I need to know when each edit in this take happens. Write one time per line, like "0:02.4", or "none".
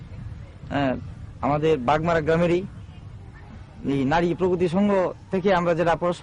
none